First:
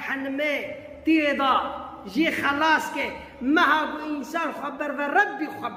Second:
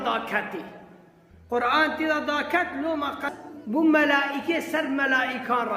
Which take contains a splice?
second; 1 cut; at 3.3 s

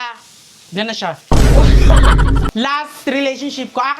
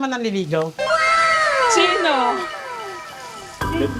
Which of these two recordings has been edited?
first; 1 cut; at 2.5 s

